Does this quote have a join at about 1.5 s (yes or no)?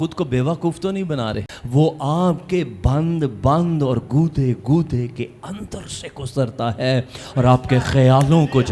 yes